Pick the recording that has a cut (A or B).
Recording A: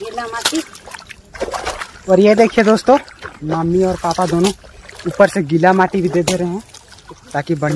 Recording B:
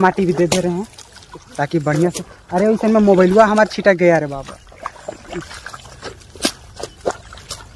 B